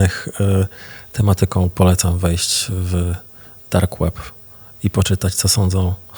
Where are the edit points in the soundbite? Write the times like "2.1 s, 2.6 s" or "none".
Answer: none